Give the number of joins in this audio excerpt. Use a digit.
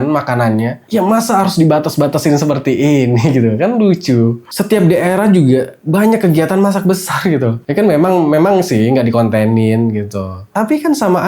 1